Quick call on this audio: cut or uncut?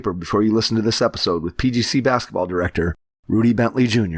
uncut